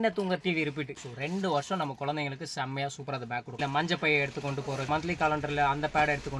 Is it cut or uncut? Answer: cut